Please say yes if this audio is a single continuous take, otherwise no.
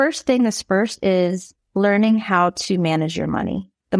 yes